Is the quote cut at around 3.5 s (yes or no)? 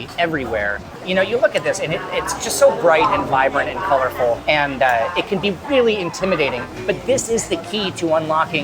no